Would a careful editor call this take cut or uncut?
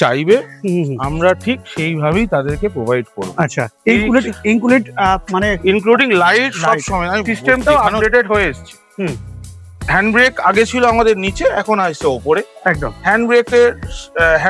cut